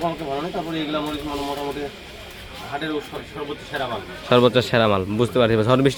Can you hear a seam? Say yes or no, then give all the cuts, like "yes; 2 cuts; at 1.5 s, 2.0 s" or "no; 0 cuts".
no; 0 cuts